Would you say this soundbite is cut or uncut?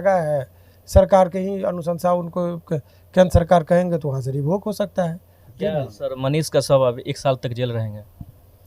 cut